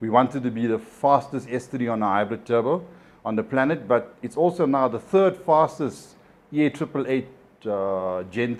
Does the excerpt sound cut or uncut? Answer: uncut